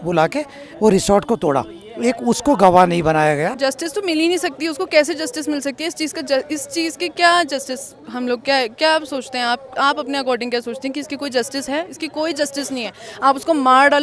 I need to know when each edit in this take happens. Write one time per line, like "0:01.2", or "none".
0:03.5